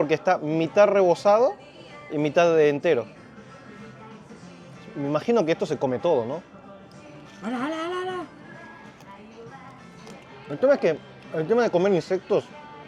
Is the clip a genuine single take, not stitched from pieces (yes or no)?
yes